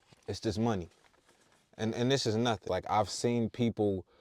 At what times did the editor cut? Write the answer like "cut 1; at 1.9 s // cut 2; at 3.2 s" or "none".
cut 1; at 2.6 s